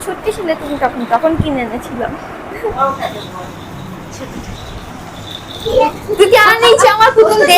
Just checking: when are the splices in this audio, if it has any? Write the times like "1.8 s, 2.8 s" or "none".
2.8 s